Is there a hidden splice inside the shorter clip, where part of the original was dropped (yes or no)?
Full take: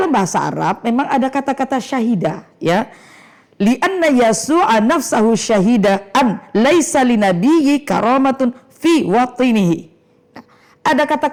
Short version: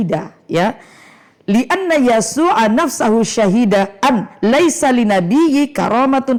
no